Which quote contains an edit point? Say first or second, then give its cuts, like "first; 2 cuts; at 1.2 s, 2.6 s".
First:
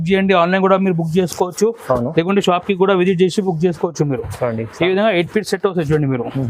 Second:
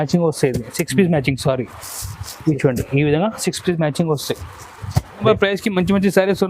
second; 1 cut; at 5.2 s